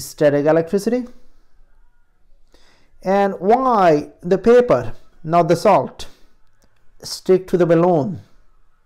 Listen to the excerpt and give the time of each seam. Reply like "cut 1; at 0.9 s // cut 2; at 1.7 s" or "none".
none